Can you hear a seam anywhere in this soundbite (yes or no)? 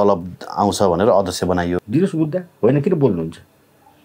yes